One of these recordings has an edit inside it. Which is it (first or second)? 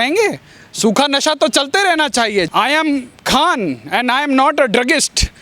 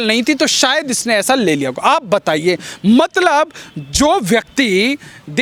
first